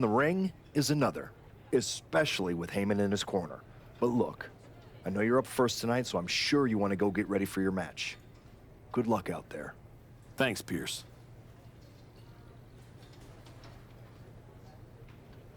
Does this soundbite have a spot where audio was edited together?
yes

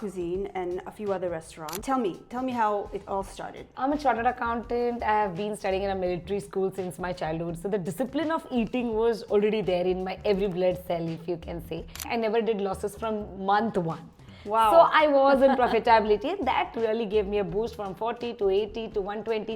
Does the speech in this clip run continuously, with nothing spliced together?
no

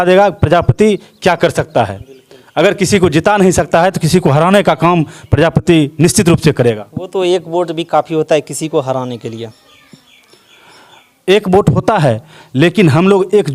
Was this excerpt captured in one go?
yes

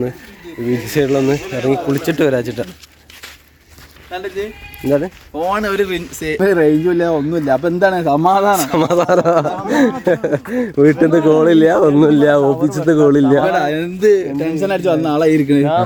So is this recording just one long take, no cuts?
yes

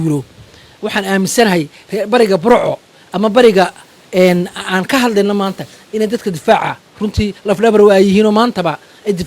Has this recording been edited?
no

